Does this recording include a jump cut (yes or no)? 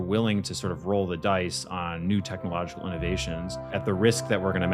yes